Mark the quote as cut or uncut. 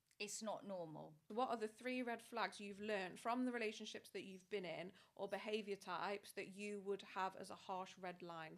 cut